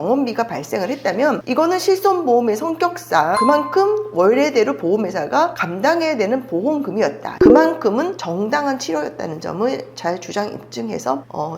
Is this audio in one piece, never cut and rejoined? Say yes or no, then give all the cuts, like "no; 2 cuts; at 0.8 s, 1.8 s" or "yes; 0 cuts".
no; 1 cut; at 7.3 s